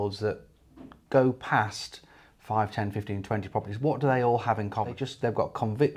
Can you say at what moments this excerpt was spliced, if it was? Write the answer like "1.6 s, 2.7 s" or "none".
5.0 s